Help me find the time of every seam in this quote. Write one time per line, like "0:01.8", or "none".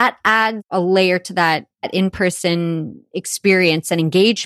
none

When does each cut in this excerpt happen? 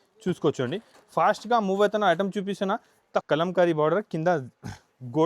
0:03.2

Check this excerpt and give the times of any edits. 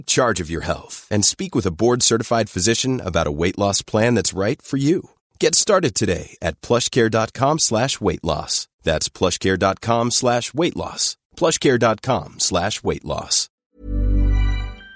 0:13.6

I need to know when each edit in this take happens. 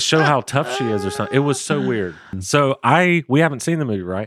0:02.4

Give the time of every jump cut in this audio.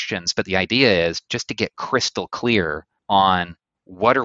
0:02.9

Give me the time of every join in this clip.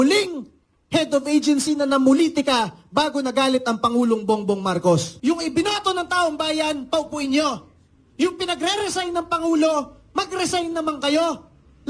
0:05.1

